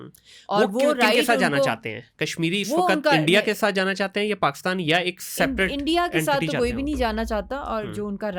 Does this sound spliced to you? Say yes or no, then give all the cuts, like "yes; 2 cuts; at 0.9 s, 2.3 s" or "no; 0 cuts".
no; 0 cuts